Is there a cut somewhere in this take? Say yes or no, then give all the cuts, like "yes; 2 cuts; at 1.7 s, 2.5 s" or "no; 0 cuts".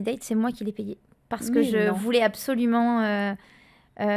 no; 0 cuts